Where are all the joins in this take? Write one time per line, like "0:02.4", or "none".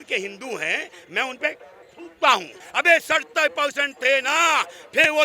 0:02.6

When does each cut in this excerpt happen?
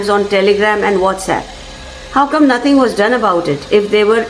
none

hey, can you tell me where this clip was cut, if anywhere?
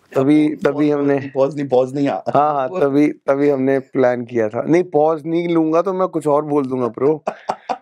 none

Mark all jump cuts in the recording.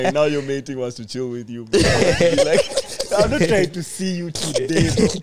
none

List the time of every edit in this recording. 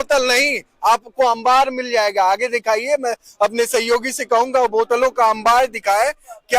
none

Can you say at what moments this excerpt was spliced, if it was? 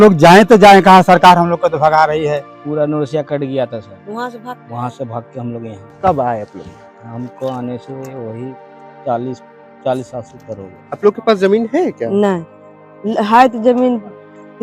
0:02.5
0:05.8
0:10.7

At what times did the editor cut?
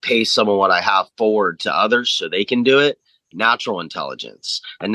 0:03.3

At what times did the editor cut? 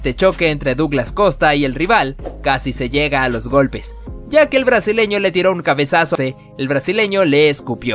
0:06.1

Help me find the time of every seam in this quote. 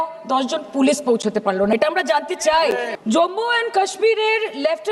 0:02.9

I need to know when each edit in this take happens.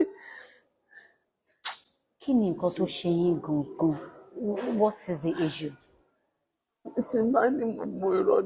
none

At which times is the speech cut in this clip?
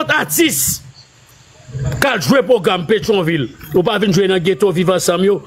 none

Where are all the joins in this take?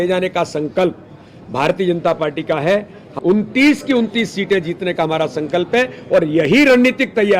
0:03.1

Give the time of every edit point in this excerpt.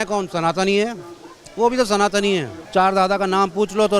0:02.6

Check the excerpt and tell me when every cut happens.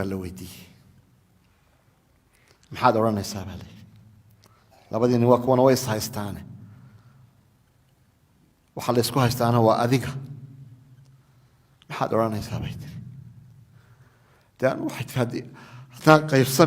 0:01.2

